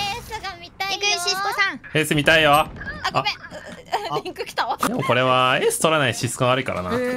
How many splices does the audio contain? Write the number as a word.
two